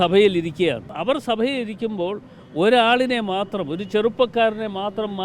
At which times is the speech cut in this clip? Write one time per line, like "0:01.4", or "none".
0:00.9